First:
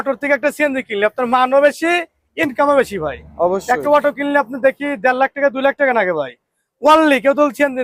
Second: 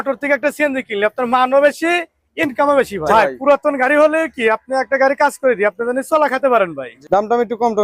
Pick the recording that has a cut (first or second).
second